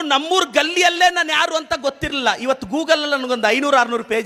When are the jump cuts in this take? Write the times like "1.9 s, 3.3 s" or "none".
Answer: none

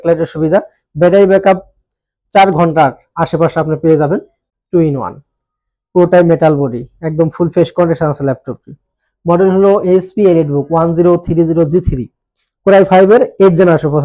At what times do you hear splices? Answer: 4.3 s

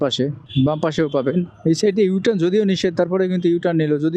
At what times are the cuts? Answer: none

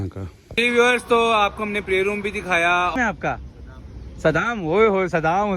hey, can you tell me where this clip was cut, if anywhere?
2.9 s

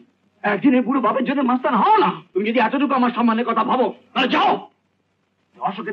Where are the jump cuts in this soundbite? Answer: 2.2 s

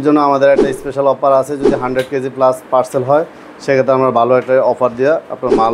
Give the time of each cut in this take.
none

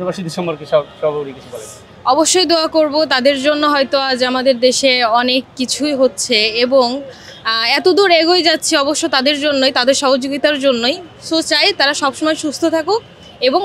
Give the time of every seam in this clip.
none

